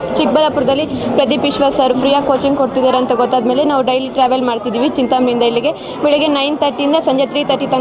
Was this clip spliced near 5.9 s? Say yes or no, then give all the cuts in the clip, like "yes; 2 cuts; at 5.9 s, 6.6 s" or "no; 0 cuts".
no; 0 cuts